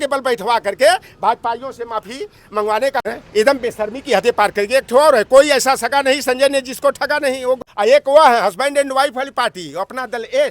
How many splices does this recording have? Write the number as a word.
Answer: two